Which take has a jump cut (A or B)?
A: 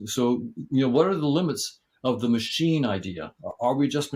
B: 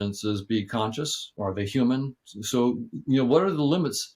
B